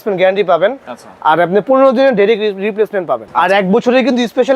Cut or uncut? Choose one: cut